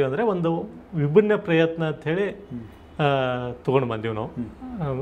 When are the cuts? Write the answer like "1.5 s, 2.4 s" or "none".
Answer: none